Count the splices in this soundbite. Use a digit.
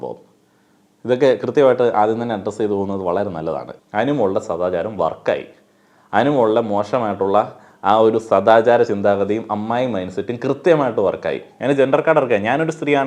2